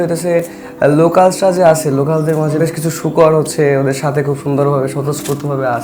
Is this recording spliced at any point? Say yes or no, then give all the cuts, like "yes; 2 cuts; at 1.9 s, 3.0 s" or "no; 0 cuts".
no; 0 cuts